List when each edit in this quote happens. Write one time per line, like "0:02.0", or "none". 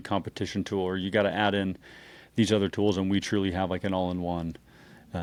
none